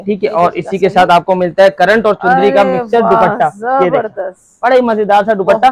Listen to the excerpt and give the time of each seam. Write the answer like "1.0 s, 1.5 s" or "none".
none